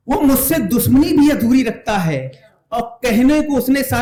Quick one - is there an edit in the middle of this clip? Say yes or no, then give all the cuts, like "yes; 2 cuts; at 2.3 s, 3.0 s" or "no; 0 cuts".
no; 0 cuts